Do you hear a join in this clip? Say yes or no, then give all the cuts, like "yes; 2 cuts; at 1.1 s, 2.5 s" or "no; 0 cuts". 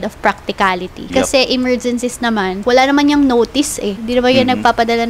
yes; 3 cuts; at 1.0 s, 2.6 s, 4.0 s